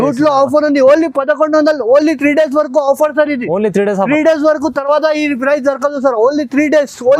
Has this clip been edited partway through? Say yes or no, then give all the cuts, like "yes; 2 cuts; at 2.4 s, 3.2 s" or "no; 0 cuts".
no; 0 cuts